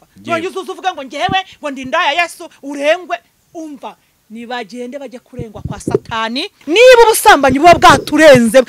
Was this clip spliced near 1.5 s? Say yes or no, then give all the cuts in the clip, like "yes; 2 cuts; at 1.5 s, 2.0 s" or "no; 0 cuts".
no; 1 cut; at 6.6 s